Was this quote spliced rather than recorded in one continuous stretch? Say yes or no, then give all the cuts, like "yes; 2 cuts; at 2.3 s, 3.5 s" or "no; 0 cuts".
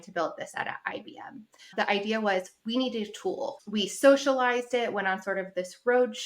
yes; 2 cuts; at 1.5 s, 3.5 s